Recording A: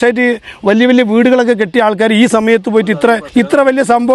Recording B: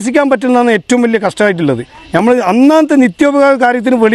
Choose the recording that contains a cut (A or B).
A